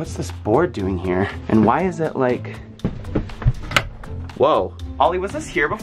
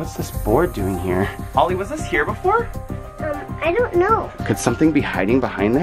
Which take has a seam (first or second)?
second